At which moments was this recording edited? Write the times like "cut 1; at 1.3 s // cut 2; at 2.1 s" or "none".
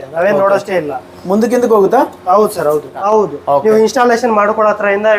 cut 1; at 3.0 s